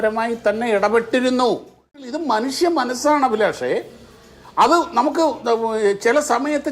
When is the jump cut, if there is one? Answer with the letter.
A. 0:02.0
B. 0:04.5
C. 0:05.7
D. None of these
A